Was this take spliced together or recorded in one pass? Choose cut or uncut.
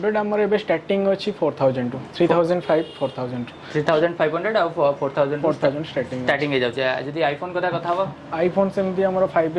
uncut